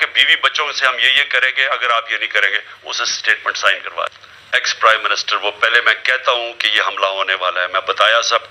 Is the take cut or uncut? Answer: cut